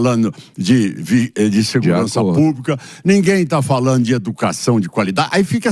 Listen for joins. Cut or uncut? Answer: uncut